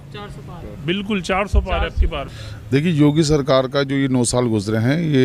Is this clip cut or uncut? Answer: cut